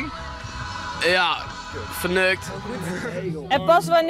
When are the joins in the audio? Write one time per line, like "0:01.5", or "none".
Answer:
0:02.8